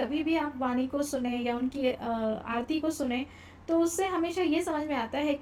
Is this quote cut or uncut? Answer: uncut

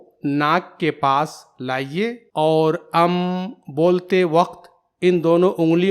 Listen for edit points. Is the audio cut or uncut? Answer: cut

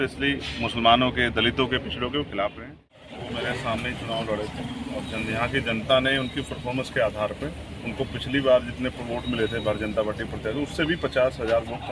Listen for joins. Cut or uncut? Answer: cut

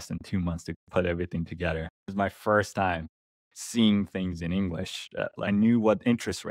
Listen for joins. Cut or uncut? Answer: cut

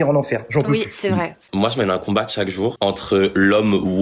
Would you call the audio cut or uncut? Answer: cut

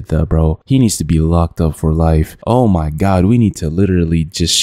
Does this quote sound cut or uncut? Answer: uncut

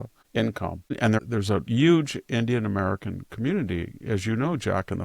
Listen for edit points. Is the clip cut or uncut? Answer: cut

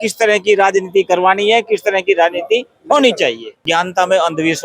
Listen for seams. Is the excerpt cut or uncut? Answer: cut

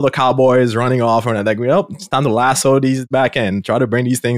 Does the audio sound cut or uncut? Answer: uncut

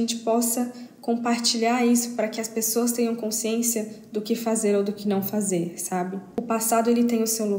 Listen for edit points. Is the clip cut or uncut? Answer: uncut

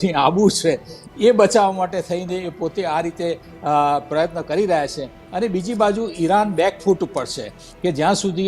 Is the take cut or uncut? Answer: uncut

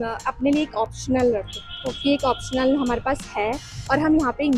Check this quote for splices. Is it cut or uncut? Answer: uncut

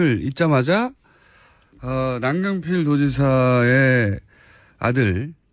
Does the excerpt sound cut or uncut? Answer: cut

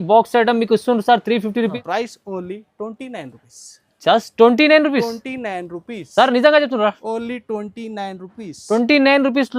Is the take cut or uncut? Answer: cut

